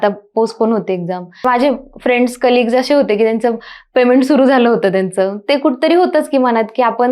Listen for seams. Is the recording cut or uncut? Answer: cut